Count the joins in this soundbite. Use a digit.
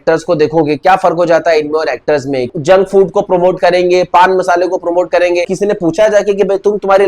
2